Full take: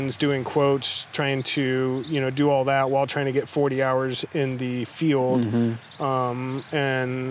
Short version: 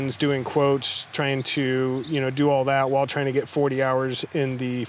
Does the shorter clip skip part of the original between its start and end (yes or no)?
no